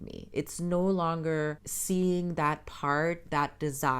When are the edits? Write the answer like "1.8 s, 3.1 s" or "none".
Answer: 1.7 s